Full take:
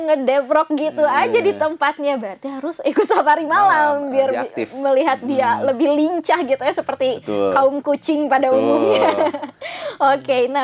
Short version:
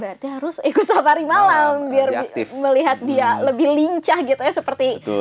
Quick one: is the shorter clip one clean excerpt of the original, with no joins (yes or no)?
yes